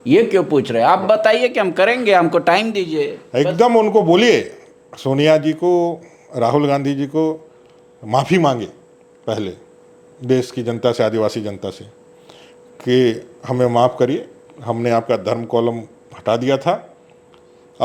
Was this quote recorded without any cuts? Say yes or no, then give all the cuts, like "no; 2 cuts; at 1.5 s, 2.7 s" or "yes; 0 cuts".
yes; 0 cuts